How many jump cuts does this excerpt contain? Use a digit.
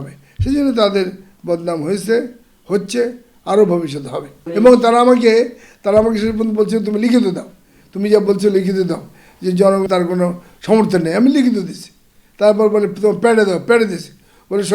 2